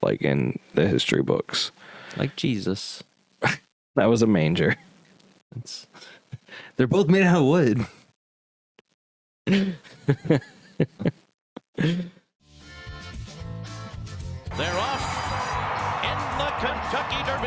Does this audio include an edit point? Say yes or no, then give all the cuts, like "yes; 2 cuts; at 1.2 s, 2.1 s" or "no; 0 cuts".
yes; 1 cut; at 12.4 s